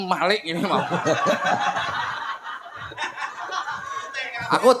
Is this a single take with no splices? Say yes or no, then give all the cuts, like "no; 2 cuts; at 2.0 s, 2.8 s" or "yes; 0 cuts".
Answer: yes; 0 cuts